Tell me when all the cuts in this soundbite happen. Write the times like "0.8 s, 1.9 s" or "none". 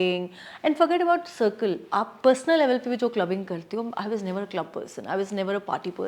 none